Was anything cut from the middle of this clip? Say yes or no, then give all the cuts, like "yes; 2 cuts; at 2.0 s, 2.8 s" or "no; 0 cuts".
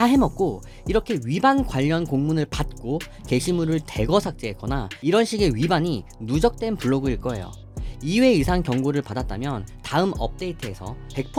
no; 0 cuts